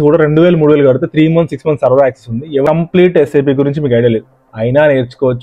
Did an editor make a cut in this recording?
yes; 1 cut; at 2.6 s

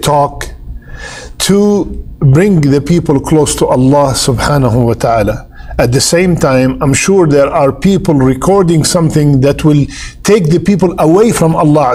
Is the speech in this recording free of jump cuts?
yes; 0 cuts

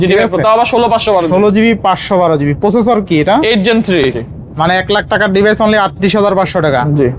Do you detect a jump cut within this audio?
yes; 1 cut; at 4.1 s

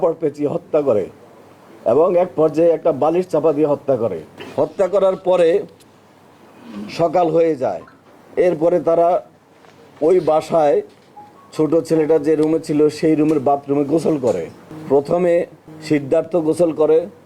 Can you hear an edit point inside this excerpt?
no; 0 cuts

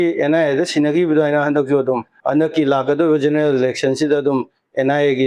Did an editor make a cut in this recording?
yes; 1 cut; at 2.1 s

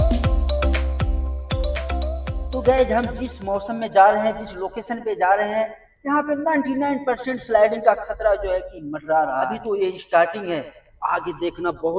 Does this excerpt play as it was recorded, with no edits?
yes; 0 cuts

